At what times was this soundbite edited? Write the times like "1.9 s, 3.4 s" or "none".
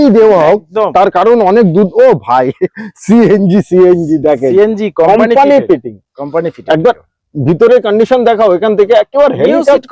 none